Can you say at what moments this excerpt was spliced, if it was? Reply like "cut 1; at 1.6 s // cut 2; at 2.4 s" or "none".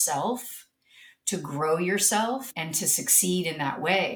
cut 1; at 2.5 s